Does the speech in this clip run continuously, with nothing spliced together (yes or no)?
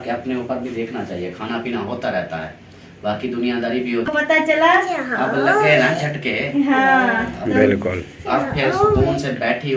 no